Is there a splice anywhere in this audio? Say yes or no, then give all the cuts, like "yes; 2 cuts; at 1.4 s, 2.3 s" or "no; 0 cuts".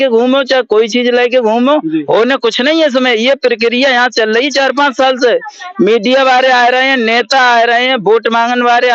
no; 0 cuts